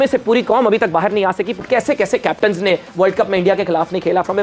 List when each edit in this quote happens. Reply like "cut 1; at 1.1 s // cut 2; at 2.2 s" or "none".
cut 1; at 1.6 s